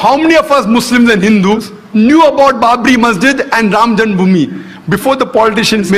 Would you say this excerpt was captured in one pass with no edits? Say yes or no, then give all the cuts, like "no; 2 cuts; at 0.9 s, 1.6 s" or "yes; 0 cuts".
yes; 0 cuts